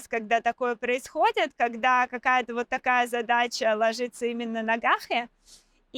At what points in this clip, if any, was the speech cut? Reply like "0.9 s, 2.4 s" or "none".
none